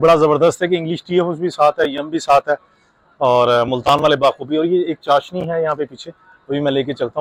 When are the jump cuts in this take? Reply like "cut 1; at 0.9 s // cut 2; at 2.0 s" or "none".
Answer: none